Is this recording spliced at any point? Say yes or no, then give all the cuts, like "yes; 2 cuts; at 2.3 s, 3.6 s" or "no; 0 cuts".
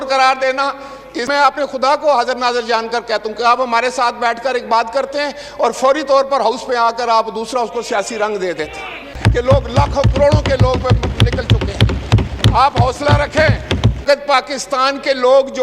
yes; 3 cuts; at 1.2 s, 9.1 s, 14.0 s